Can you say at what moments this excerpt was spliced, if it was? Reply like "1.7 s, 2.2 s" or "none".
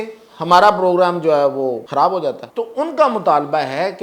1.8 s, 2.4 s